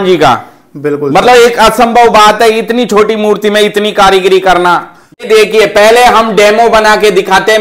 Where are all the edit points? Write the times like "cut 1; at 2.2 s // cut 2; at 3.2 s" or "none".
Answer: cut 1; at 5.2 s